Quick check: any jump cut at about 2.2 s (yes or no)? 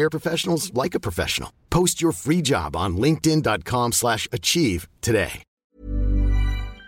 no